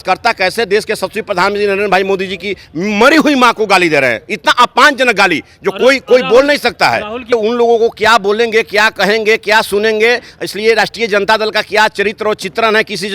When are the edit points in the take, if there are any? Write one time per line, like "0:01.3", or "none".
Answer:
0:07.3